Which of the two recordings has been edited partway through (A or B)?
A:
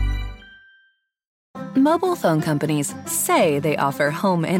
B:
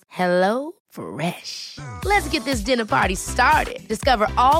A